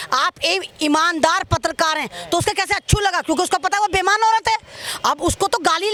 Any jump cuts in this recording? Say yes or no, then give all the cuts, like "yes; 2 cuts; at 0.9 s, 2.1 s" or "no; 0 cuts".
no; 0 cuts